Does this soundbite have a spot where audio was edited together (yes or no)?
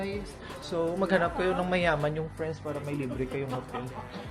no